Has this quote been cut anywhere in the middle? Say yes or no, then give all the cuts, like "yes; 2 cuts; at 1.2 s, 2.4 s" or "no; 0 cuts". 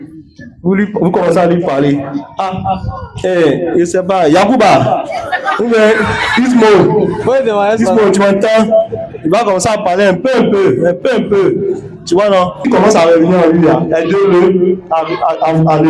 yes; 1 cut; at 12.6 s